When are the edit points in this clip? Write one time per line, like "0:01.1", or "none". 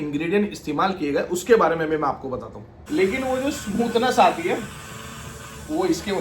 0:02.8